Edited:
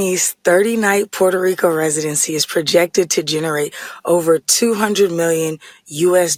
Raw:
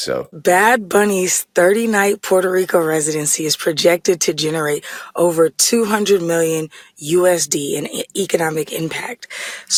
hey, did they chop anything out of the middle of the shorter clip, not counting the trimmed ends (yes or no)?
no